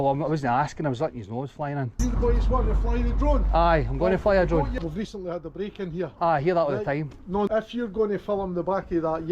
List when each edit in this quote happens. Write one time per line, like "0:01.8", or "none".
0:01.9
0:04.7
0:07.5